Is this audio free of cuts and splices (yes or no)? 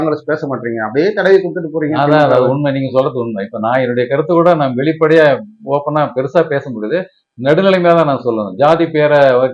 yes